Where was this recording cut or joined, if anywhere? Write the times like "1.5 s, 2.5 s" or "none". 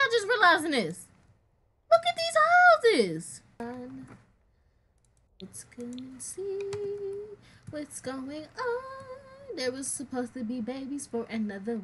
3.6 s

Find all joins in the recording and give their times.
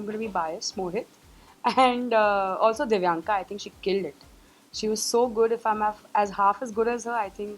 none

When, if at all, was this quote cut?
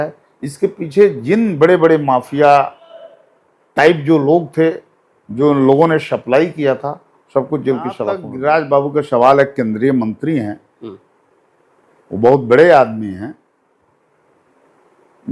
8.3 s

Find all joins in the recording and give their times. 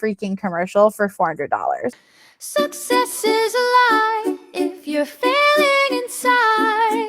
1.9 s

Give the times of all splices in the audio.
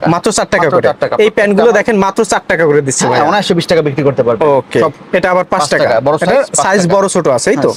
none

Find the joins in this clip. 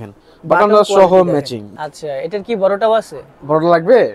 1.6 s

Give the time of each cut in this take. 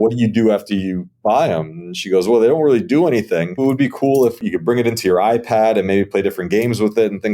3.6 s, 4.4 s

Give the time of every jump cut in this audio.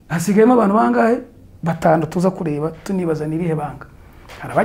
none

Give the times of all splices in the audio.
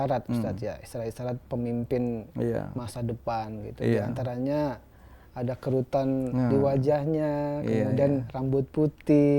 none

